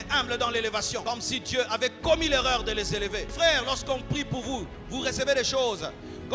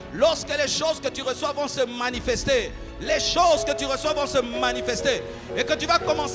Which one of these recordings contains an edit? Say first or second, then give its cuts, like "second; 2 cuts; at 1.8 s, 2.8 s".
first; 2 cuts; at 1.0 s, 3.3 s